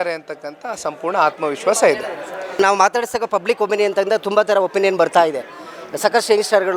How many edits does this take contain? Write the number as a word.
one